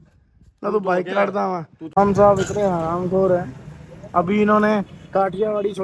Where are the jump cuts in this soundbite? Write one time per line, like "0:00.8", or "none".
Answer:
0:02.0